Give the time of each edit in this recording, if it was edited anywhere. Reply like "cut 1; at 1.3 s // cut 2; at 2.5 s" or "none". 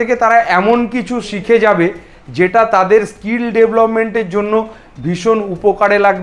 none